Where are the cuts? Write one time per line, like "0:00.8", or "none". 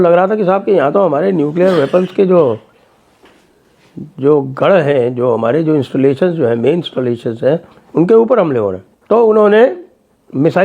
0:08.9